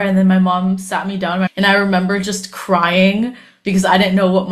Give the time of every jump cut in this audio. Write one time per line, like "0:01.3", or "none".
0:01.5